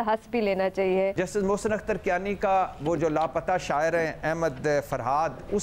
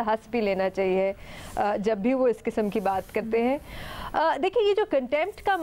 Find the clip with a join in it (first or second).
first